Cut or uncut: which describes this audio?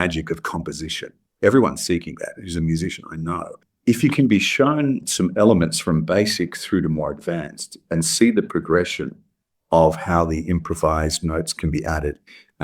cut